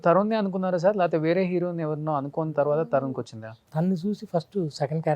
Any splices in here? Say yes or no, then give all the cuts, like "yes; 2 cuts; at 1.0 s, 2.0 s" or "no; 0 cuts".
yes; 1 cut; at 3.6 s